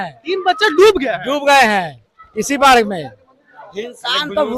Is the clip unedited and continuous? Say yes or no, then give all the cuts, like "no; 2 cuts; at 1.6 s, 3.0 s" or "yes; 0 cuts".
yes; 0 cuts